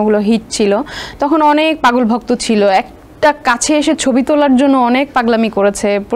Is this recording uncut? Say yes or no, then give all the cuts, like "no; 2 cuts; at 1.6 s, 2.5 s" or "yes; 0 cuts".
yes; 0 cuts